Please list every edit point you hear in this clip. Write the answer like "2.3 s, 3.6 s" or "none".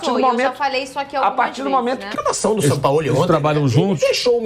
2.1 s